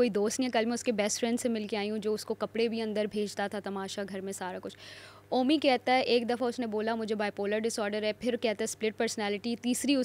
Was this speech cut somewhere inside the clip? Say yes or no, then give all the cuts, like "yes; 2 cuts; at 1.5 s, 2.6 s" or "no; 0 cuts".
no; 0 cuts